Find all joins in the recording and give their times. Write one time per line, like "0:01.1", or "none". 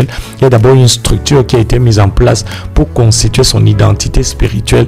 none